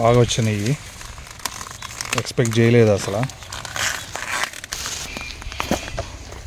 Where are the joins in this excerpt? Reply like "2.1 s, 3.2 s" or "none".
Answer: 4.8 s